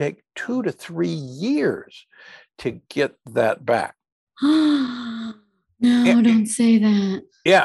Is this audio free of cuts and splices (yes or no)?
yes